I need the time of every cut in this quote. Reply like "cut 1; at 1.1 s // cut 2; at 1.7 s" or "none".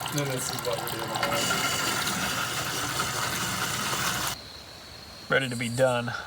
cut 1; at 4.3 s

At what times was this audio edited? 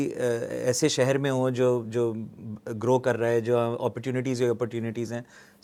none

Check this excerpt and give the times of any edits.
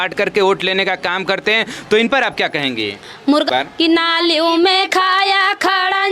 cut 1; at 3.5 s

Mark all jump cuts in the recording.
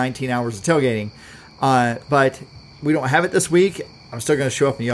none

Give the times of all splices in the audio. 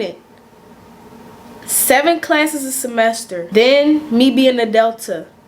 cut 1; at 3.5 s

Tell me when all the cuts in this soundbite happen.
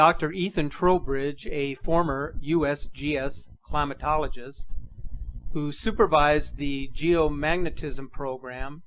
cut 1; at 5.9 s

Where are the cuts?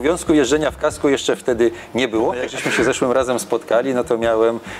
cut 1; at 2.5 s

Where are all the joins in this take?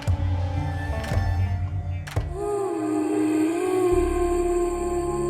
cut 1; at 2.4 s

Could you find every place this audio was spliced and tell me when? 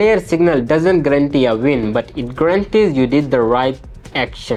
none

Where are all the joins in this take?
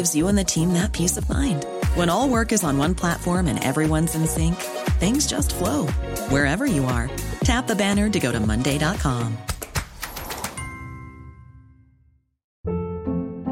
none

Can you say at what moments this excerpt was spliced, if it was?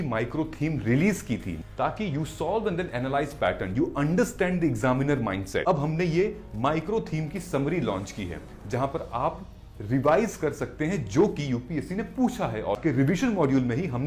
cut 1; at 1.5 s // cut 2; at 5.6 s // cut 3; at 12.8 s

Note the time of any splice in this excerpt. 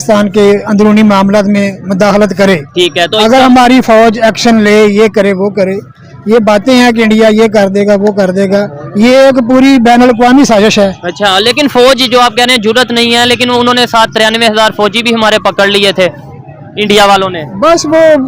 none

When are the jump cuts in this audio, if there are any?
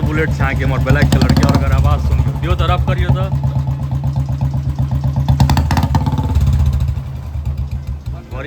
none

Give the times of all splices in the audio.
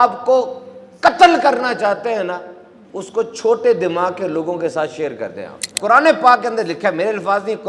cut 1; at 5.7 s

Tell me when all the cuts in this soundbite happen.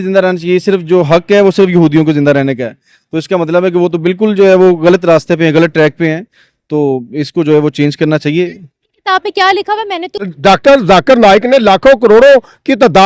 cut 1; at 10.2 s

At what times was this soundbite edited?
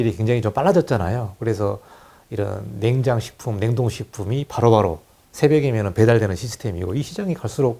none

